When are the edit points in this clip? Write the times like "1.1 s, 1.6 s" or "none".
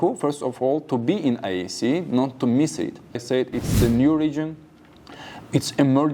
3.2 s